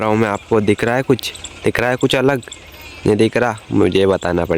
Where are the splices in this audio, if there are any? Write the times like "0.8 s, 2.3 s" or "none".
none